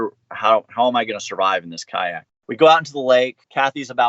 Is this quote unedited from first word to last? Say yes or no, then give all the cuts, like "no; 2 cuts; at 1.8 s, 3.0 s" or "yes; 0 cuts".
no; 1 cut; at 2.4 s